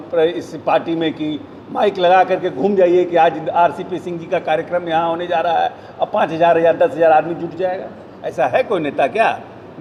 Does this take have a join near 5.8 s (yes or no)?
no